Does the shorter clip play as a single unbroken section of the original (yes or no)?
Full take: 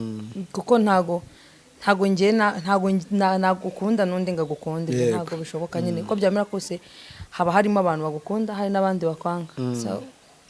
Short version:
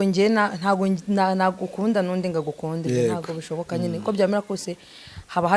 yes